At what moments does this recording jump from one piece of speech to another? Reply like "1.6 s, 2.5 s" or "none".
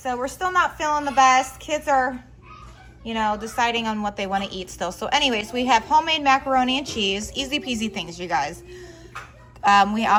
none